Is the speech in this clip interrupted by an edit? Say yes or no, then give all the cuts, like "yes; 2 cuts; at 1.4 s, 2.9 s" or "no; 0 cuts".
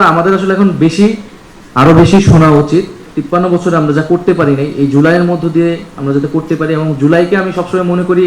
yes; 1 cut; at 3.1 s